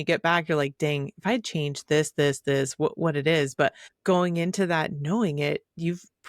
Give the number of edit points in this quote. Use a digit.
1